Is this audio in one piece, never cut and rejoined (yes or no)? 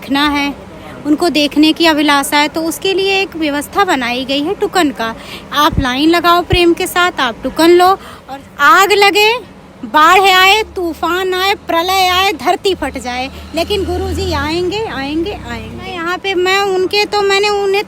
no